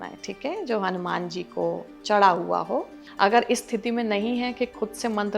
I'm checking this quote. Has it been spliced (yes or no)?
yes